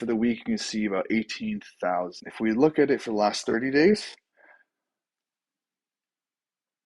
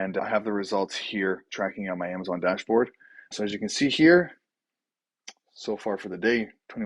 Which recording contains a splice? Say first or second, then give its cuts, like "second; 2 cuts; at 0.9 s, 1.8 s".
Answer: first; 1 cut; at 2.3 s